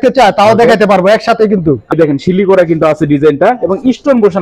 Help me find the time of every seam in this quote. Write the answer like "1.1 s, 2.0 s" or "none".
1.9 s